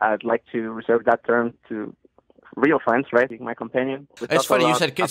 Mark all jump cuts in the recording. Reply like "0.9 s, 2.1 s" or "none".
1.6 s, 3.8 s